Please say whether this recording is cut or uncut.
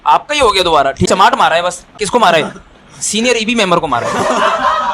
cut